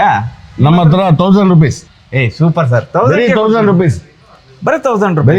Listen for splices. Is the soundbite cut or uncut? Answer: uncut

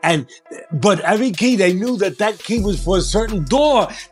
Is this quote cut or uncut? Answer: uncut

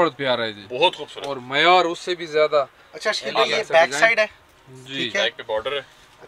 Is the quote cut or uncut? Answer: uncut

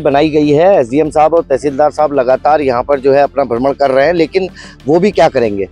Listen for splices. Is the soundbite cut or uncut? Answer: uncut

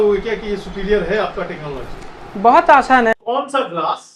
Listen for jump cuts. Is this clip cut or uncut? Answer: cut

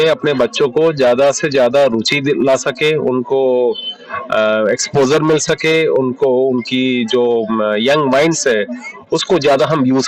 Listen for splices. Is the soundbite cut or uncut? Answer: uncut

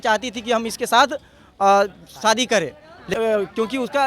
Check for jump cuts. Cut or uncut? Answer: cut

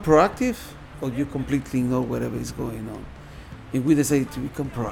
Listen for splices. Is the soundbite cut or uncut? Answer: uncut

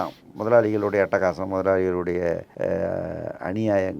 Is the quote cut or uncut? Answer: cut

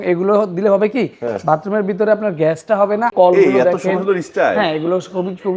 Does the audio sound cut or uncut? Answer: cut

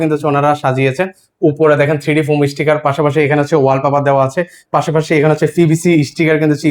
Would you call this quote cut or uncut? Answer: uncut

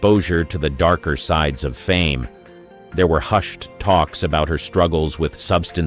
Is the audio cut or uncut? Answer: uncut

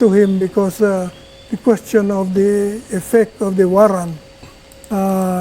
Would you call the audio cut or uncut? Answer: uncut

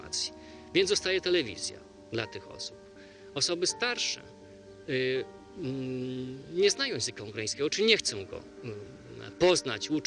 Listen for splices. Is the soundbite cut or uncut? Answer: cut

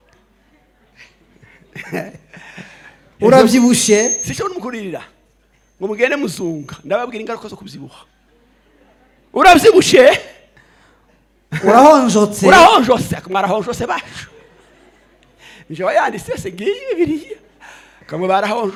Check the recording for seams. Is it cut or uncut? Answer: uncut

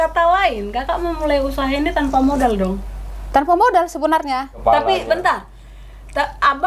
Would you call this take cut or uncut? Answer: cut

